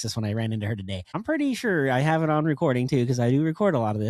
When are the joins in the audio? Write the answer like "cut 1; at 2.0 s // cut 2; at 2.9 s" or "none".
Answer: cut 1; at 1.1 s